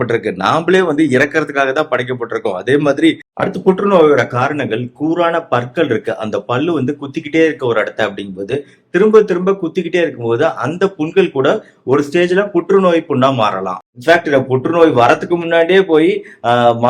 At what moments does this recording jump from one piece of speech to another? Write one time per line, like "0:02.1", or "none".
0:03.3
0:13.8